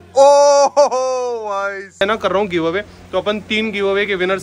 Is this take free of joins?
no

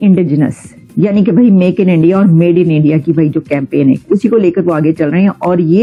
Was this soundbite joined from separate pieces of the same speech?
no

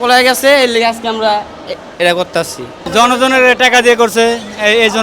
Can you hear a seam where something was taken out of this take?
yes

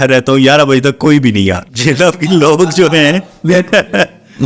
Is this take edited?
yes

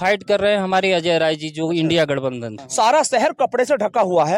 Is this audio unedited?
no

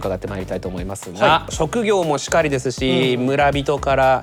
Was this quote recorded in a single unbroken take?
yes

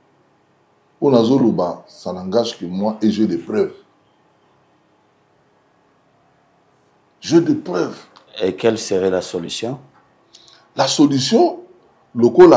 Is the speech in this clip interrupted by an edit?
no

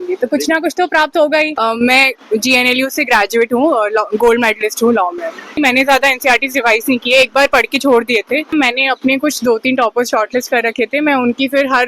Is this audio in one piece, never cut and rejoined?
no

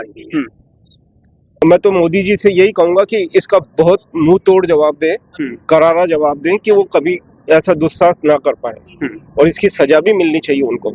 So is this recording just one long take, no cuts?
no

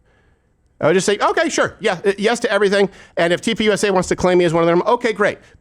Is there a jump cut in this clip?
no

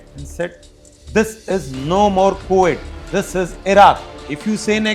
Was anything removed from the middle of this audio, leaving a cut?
no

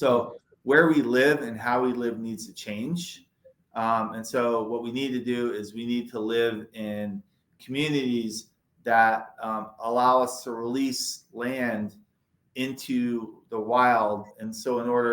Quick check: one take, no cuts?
yes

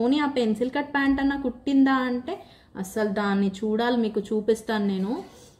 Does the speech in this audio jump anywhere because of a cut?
no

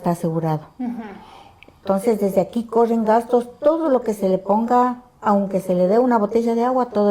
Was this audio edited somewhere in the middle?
no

